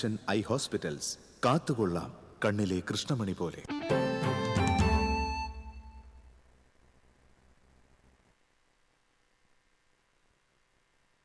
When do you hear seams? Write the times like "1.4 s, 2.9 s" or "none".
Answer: none